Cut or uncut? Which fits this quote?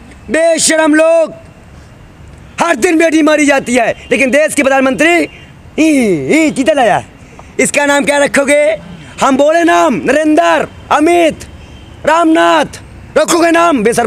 uncut